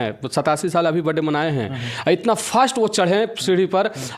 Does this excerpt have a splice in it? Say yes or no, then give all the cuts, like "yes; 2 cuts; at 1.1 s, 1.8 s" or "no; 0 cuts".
no; 0 cuts